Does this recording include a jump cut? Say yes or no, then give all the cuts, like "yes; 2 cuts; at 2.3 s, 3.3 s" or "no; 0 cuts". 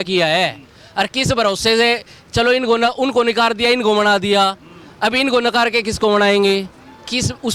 no; 0 cuts